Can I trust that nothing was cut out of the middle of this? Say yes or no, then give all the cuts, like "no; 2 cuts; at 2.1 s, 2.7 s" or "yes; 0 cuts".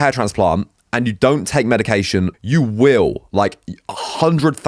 no; 1 cut; at 2.4 s